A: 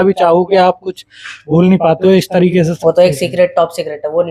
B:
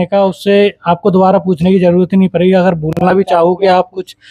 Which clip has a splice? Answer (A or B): A